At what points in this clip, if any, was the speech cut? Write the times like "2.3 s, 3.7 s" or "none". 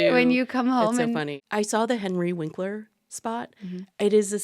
1.3 s